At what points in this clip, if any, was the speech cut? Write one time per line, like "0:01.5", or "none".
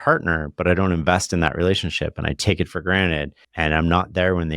0:03.4